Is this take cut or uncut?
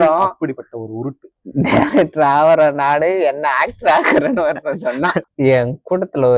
cut